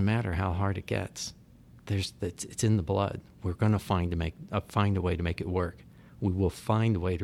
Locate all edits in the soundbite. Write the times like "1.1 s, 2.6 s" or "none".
none